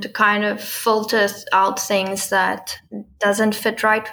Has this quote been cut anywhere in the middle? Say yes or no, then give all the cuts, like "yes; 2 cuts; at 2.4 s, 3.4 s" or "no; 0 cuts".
no; 0 cuts